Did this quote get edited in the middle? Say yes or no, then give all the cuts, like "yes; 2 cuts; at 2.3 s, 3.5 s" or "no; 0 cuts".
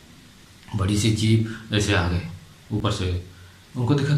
no; 0 cuts